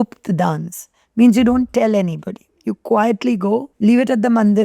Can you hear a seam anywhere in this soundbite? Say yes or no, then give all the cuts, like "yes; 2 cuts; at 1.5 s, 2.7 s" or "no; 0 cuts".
yes; 1 cut; at 3.7 s